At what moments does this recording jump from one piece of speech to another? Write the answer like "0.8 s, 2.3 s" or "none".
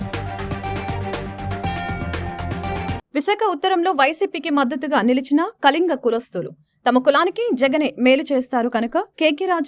3.0 s